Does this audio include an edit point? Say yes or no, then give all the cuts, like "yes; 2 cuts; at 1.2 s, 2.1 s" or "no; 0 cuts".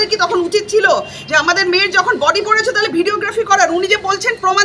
no; 0 cuts